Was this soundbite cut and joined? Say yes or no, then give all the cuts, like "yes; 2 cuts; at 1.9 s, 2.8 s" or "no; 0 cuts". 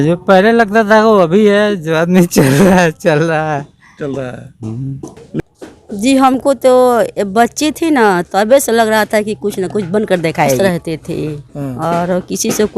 yes; 2 cuts; at 5.4 s, 10.6 s